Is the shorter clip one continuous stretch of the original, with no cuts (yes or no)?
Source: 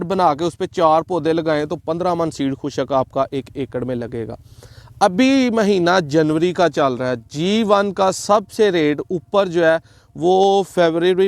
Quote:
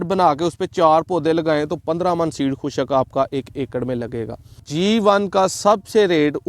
no